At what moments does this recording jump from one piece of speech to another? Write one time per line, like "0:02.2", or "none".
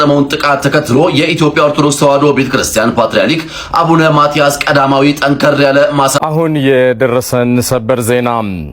0:06.2